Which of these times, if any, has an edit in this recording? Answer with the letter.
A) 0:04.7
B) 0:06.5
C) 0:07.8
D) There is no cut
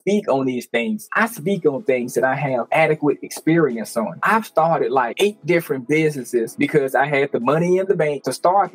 B